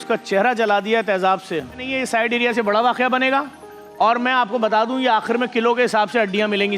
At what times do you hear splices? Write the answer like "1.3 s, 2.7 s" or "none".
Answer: 1.9 s